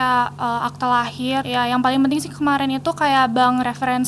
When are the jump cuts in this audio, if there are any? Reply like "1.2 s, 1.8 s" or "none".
1.5 s